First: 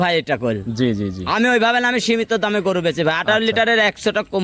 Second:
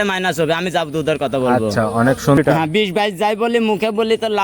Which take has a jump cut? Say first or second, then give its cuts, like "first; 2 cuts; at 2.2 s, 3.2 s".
second; 1 cut; at 2.4 s